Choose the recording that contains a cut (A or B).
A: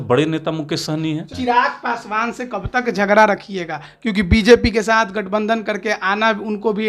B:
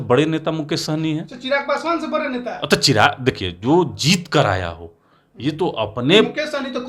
A